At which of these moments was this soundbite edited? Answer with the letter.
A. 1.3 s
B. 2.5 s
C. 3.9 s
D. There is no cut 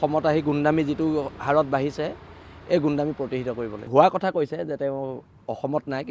C